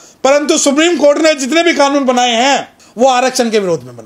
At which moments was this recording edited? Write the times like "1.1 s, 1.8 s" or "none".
2.8 s